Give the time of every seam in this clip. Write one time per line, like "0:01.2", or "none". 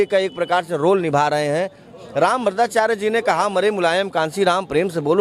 0:01.9